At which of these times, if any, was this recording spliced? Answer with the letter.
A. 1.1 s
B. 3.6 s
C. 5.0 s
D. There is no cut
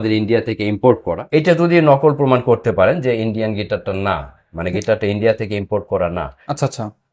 A